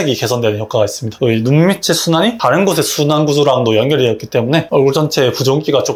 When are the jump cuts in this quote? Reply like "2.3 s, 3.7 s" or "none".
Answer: none